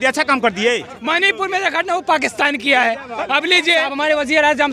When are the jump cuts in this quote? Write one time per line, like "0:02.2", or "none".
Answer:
0:00.9
0:03.9